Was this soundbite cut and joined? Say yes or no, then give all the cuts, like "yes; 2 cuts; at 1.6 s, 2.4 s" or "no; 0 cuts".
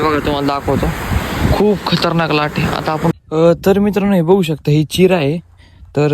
yes; 1 cut; at 3.1 s